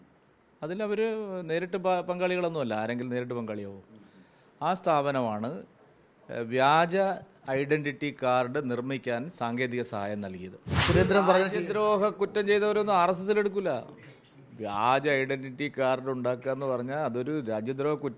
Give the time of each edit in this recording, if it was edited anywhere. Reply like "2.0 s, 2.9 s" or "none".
10.8 s